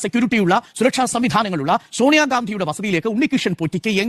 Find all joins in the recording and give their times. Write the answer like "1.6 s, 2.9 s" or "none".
none